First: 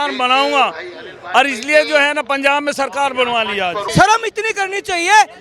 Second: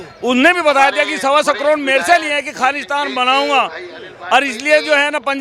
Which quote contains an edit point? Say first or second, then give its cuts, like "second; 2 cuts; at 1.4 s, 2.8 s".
first; 1 cut; at 3.8 s